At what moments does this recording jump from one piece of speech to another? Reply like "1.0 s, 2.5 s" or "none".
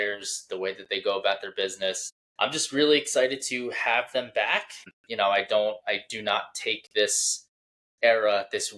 2.1 s, 4.9 s